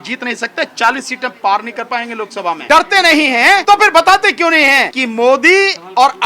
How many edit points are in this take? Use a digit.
3